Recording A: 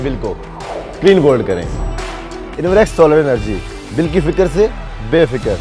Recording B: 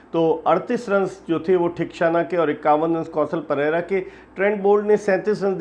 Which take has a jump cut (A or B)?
A